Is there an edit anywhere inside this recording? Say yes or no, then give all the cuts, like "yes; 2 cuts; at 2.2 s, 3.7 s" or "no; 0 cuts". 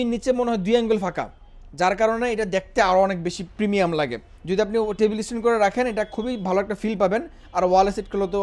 no; 0 cuts